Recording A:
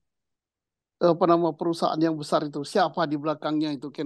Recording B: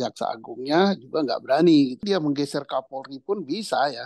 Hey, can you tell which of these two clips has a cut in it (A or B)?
B